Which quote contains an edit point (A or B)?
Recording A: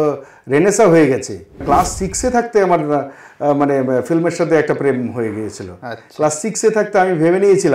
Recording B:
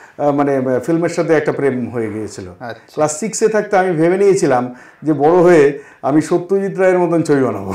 A